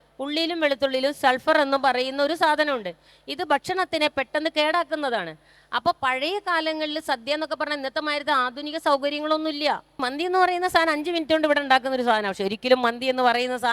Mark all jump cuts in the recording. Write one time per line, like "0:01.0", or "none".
0:10.0